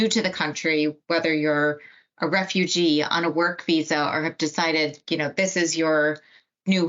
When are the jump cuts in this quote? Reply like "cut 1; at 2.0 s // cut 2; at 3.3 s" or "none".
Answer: none